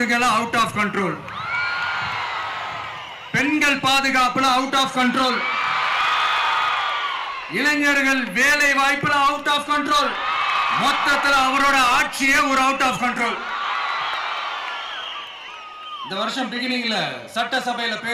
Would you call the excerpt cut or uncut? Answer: uncut